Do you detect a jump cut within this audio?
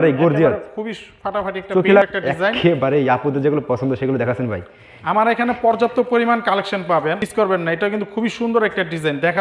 yes; 2 cuts; at 2.0 s, 7.2 s

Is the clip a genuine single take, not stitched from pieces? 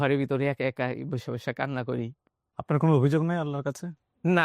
no; 1 cut; at 2.5 s

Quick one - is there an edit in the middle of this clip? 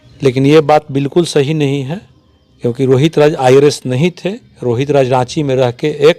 no; 0 cuts

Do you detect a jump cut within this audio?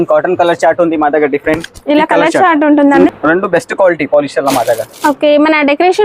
yes; 1 cut; at 3.0 s

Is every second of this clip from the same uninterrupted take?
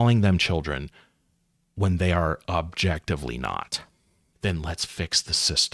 no; 1 cut; at 4.3 s

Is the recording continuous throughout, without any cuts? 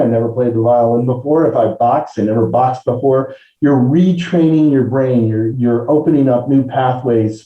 no; 1 cut; at 5.5 s

